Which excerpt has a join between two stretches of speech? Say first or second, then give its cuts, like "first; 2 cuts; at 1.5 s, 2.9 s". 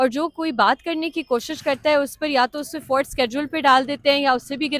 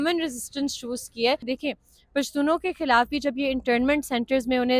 second; 1 cut; at 1.5 s